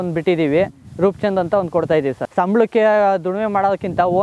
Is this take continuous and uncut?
no; 1 cut; at 2.2 s

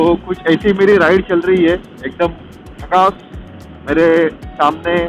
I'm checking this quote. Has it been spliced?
no; 0 cuts

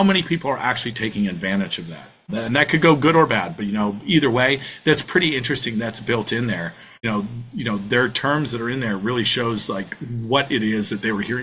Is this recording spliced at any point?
yes; 1 cut; at 7.1 s

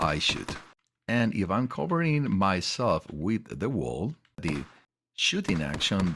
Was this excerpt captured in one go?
no; 1 cut; at 4.4 s

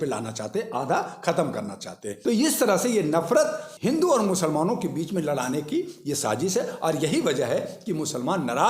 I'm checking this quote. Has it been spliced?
yes; 2 cuts; at 2.1 s, 3.7 s

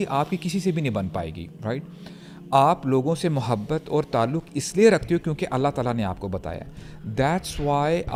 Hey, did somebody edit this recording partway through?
no; 0 cuts

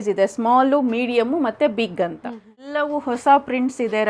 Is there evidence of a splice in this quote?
yes; 1 cut; at 2.6 s

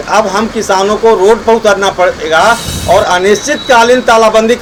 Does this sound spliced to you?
no; 0 cuts

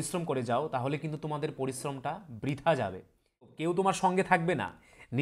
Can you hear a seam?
yes; 1 cut; at 3.4 s

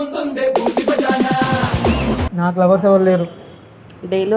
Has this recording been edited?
yes; 1 cut; at 2.2 s

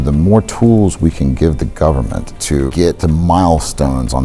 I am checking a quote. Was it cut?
yes; 1 cut; at 2.9 s

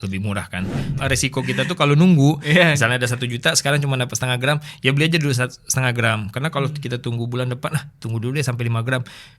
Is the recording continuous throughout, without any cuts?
no; 1 cut; at 0.9 s

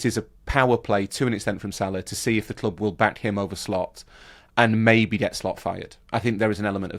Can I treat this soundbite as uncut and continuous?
yes; 0 cuts

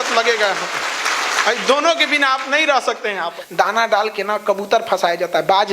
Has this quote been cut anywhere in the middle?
yes; 1 cut; at 3.4 s

